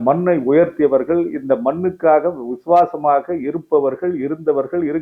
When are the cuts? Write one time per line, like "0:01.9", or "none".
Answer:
none

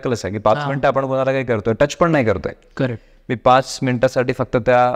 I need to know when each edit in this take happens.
none

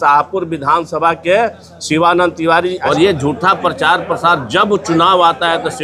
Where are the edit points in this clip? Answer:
0:02.8

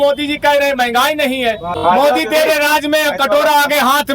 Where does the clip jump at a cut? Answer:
0:01.7

